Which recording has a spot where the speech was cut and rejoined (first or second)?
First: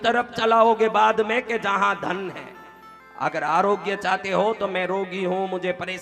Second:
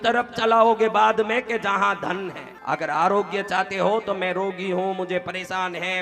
second